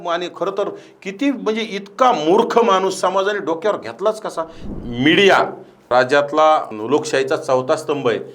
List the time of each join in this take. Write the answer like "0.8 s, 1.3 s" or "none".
4.6 s, 5.9 s, 6.7 s